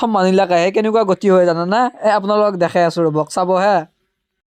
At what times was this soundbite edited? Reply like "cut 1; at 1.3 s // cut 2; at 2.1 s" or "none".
none

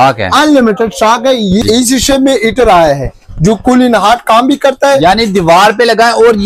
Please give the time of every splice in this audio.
cut 1; at 1.6 s

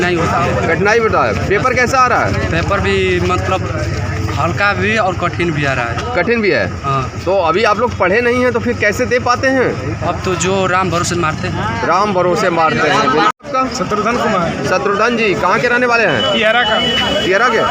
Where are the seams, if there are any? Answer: none

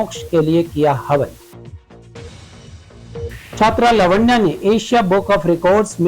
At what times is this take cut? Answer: cut 1; at 3.6 s

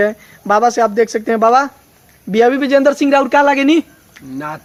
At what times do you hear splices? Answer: none

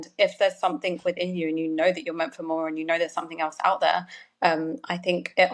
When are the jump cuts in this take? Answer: none

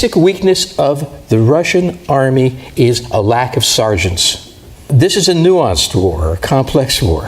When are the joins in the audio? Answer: cut 1; at 4.8 s

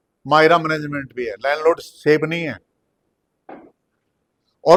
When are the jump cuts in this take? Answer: none

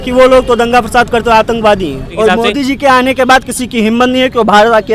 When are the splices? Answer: cut 1; at 2.0 s

